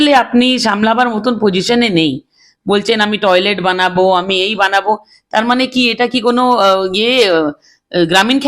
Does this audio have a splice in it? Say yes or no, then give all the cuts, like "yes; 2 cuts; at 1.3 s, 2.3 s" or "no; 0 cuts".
no; 0 cuts